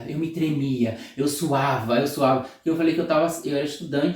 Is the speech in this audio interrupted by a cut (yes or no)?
no